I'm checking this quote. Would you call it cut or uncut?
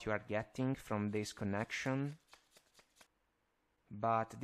cut